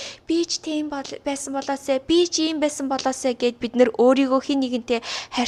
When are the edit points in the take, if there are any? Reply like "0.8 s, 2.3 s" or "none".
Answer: none